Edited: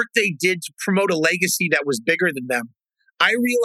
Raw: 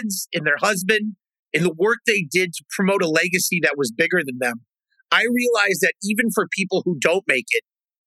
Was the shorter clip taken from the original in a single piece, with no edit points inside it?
yes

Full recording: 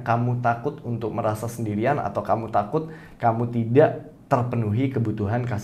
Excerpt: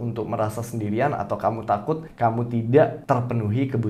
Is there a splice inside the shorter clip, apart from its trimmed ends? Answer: yes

